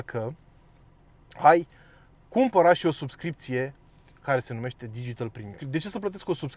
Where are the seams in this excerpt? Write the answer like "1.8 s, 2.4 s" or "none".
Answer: 5.6 s